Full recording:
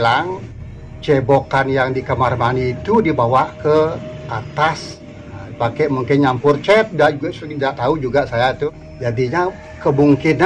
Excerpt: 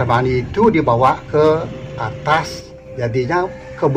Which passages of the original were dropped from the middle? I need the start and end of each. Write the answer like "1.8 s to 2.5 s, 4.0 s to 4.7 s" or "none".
5.1 s to 8.9 s